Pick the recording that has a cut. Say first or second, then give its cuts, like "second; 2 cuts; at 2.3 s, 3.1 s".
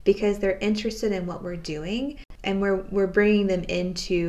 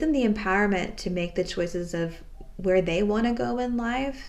first; 1 cut; at 2.3 s